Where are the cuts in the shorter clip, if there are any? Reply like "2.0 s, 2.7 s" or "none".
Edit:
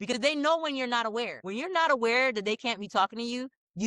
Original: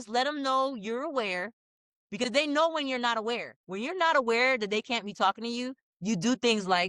1.4 s